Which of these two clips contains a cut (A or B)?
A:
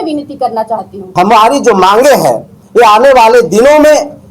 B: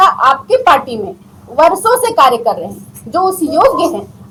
A